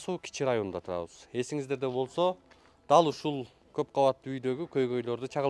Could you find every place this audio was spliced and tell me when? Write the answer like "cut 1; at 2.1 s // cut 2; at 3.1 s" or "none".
cut 1; at 3.6 s